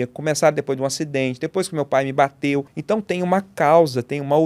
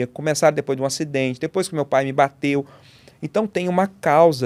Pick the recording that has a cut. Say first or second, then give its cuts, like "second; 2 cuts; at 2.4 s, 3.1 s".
first; 1 cut; at 2.7 s